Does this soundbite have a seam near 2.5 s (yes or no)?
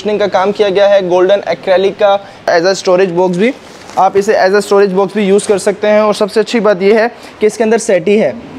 yes